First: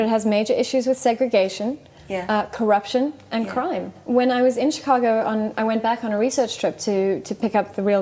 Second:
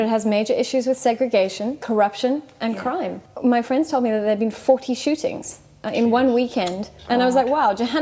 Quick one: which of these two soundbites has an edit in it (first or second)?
second